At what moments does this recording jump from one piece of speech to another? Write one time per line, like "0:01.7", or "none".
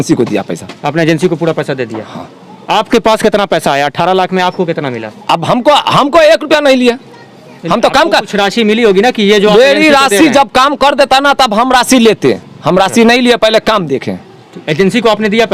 none